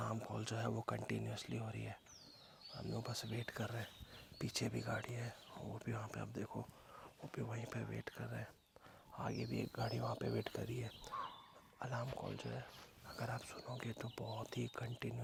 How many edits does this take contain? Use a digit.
0